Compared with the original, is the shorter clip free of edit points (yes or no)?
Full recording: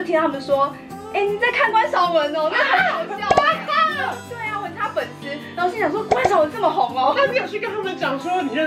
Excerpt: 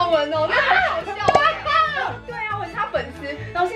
yes